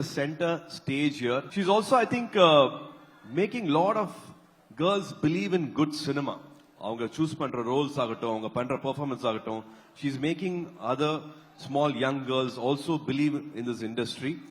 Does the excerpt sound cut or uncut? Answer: cut